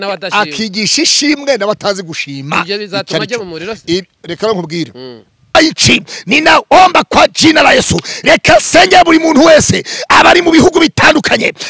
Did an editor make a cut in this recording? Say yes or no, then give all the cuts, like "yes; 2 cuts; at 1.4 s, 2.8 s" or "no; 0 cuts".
yes; 1 cut; at 5.5 s